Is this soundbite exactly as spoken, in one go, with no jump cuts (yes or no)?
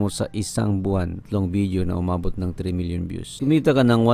no